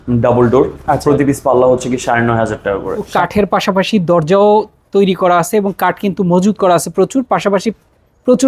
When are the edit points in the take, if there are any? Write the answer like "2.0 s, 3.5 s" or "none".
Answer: 3.1 s